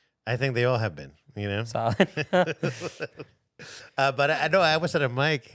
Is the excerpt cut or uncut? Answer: uncut